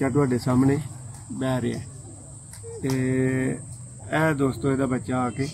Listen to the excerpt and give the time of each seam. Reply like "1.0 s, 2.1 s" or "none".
none